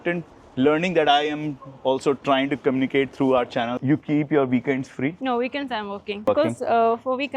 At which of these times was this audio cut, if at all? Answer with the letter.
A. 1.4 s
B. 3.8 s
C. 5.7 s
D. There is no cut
B